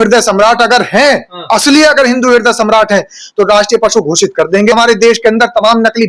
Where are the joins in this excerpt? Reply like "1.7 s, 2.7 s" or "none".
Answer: 4.7 s